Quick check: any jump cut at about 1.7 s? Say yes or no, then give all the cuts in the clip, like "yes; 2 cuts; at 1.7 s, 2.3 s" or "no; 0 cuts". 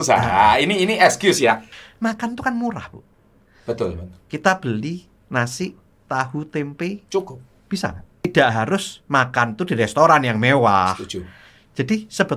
yes; 2 cuts; at 1.7 s, 8.2 s